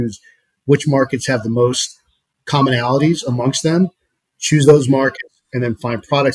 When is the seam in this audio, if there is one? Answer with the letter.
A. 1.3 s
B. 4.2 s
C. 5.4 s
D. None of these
D